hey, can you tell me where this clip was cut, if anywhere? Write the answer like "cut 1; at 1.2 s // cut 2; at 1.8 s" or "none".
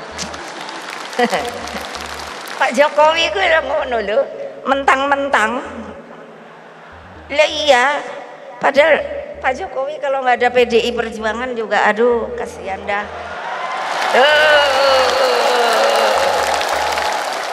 none

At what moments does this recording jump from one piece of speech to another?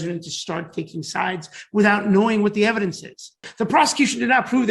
cut 1; at 3.4 s

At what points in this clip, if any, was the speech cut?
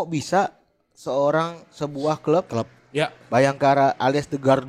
none

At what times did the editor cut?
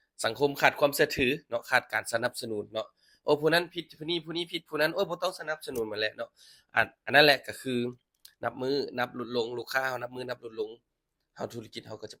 none

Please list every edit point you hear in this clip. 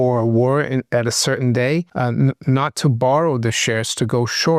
none

